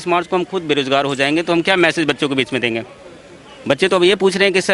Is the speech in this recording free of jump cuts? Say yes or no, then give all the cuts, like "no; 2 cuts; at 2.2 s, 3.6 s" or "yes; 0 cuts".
yes; 0 cuts